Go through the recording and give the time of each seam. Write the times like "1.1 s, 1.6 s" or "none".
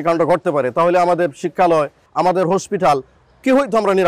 2.0 s